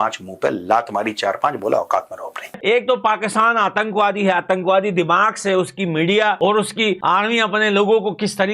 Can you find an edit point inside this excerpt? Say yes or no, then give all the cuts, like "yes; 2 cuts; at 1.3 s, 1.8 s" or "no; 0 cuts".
no; 0 cuts